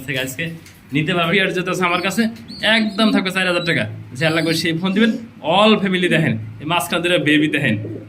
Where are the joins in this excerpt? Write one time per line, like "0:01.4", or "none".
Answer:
0:01.3